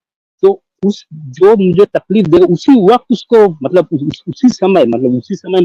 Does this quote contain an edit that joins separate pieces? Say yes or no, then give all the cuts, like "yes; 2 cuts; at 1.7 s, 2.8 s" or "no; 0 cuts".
no; 0 cuts